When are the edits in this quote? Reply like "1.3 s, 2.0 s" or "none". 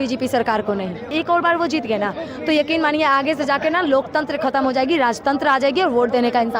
1.1 s